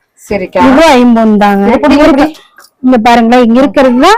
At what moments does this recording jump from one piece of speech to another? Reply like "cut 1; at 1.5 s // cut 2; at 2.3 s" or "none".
none